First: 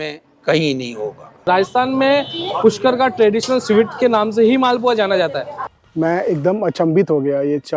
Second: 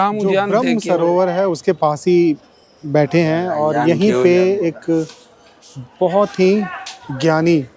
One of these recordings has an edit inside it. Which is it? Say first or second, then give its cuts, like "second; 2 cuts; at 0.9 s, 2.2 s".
first; 2 cuts; at 1.4 s, 5.6 s